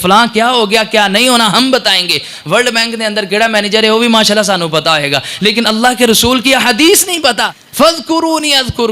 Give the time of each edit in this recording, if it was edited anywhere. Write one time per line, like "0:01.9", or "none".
0:07.5

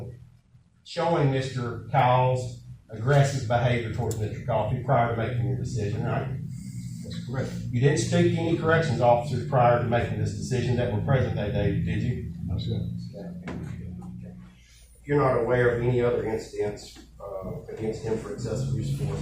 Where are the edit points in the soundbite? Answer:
0:14.4

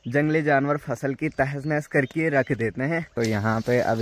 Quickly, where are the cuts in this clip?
0:03.1

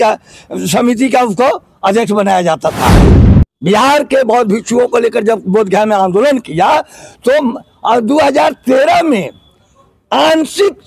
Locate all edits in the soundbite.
0:03.1

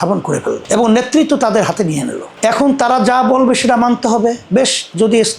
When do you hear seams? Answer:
0:02.2

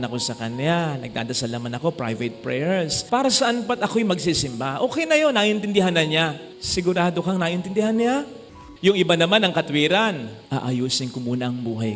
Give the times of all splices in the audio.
0:03.0
0:08.4
0:10.4

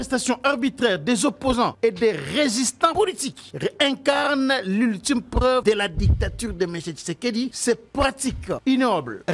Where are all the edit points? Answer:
0:01.7
0:02.9
0:05.6
0:07.6
0:08.6

